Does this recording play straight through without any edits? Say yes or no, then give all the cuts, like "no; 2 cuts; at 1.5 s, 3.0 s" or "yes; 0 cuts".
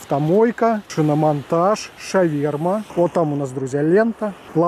no; 2 cuts; at 0.9 s, 2.9 s